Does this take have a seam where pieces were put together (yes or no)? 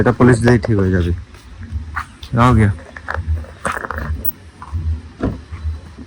no